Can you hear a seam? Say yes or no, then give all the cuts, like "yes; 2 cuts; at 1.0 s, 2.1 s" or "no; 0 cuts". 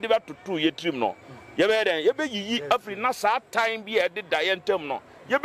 no; 0 cuts